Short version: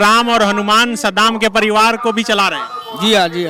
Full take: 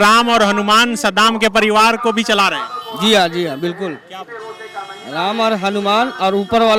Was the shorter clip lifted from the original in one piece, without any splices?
yes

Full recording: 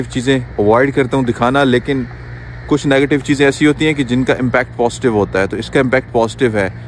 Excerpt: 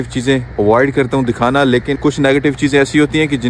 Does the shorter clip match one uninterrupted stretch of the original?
no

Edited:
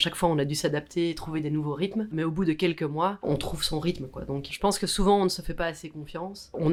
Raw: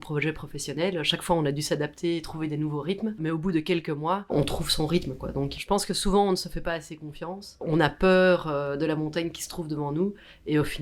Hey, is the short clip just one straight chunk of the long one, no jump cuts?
yes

